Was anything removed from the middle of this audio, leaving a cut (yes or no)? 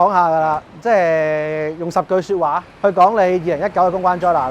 yes